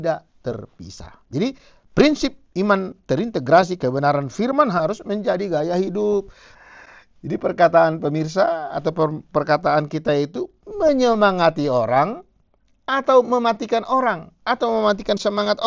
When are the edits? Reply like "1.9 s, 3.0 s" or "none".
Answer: 6.4 s

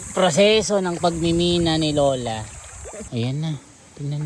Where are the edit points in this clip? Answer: 3.0 s

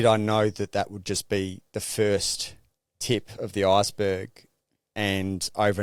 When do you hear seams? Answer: none

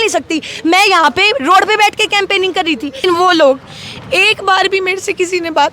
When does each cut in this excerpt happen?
3.0 s

